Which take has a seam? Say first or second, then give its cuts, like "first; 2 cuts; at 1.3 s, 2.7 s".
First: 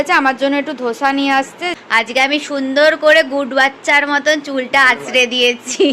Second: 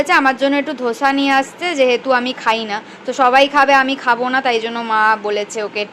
first; 1 cut; at 1.7 s